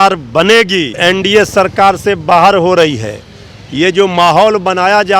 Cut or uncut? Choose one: cut